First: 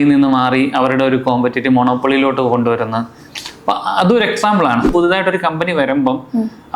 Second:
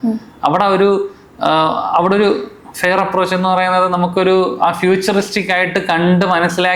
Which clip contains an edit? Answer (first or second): first